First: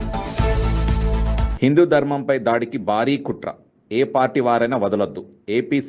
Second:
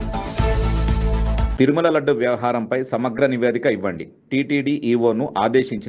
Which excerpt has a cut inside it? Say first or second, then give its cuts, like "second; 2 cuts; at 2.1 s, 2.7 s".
second; 1 cut; at 1.5 s